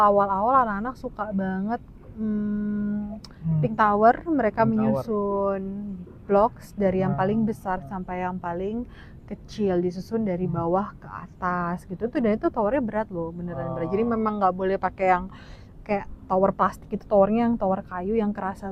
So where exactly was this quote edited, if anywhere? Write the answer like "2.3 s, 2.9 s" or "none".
none

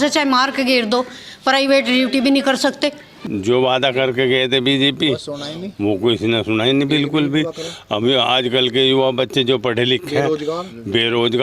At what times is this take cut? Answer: 3.1 s

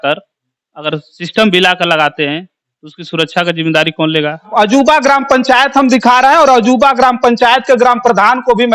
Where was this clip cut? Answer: 4.5 s

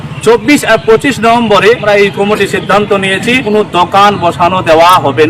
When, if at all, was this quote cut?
1.8 s, 3.5 s

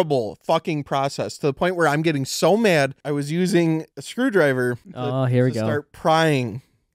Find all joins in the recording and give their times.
3.0 s, 4.0 s, 4.9 s

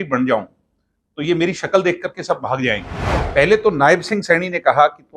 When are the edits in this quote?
3.1 s

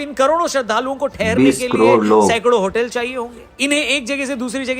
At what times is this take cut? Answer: none

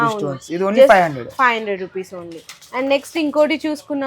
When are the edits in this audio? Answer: none

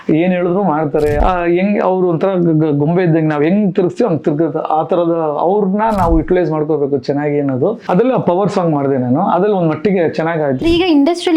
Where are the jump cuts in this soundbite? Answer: 1.2 s, 7.8 s, 10.6 s

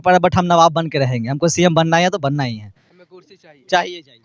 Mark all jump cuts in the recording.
none

